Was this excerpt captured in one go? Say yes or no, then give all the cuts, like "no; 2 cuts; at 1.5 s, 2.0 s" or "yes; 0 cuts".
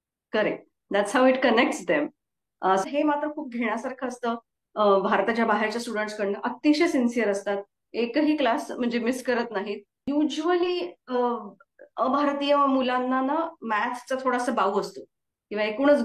no; 2 cuts; at 2.8 s, 9.9 s